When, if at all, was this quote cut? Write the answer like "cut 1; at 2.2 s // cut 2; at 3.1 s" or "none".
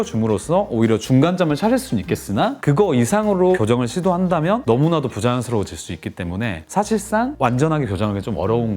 none

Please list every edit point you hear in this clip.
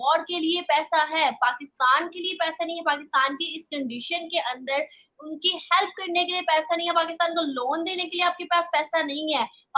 none

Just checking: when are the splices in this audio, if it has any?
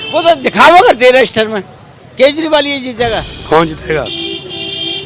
cut 1; at 3.3 s

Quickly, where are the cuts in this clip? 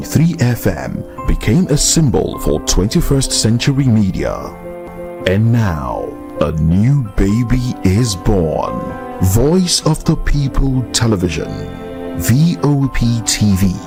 none

